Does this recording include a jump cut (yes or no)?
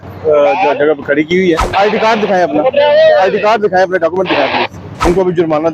yes